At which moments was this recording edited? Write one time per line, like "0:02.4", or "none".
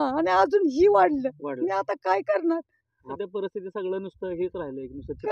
0:03.1

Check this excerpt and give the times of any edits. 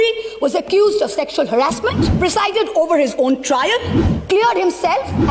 0:02.0

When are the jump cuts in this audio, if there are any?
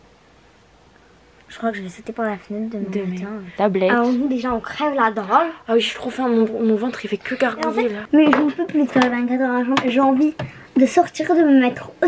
0:03.5
0:08.0

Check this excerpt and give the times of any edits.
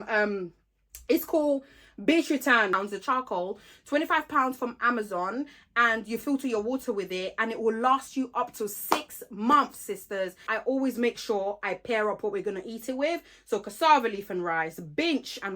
0:02.7
0:10.5

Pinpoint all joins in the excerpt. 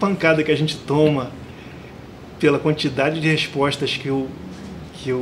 none

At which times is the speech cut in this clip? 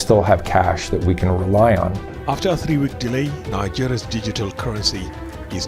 0:02.1

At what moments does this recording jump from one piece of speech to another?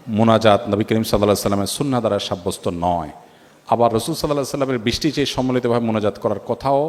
none

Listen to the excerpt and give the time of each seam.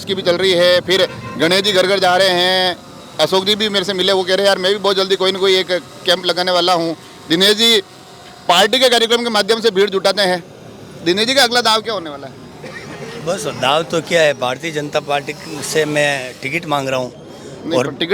none

